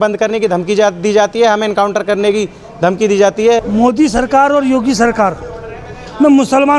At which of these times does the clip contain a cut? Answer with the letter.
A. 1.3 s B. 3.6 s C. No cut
B